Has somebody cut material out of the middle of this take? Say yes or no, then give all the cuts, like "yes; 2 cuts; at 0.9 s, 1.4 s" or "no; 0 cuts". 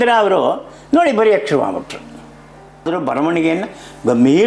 yes; 1 cut; at 2.9 s